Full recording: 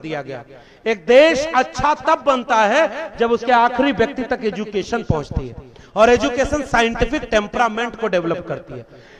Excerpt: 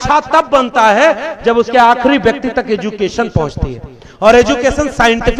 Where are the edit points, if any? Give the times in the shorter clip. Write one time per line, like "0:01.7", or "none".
none